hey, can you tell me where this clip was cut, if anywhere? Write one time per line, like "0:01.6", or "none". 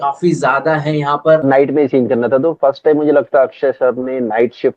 0:01.4